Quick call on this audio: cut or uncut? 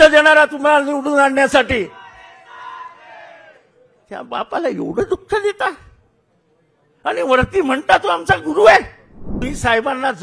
cut